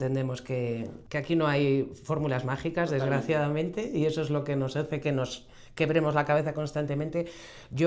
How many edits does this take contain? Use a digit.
0